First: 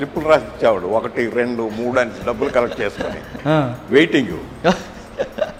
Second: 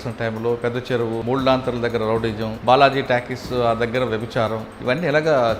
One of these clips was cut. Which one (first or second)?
second